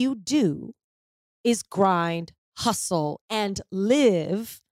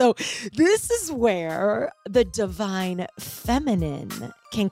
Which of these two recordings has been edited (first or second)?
first